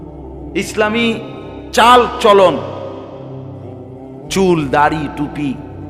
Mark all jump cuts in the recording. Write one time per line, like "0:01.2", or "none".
none